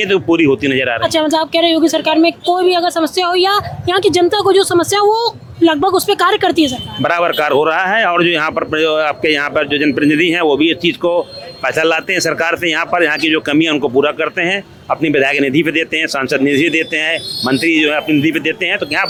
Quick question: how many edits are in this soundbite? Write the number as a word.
zero